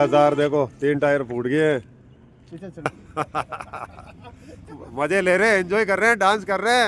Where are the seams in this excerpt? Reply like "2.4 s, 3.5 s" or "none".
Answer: 2.9 s